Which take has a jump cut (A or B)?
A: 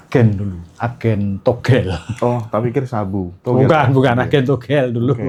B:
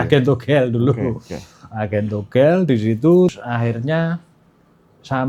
B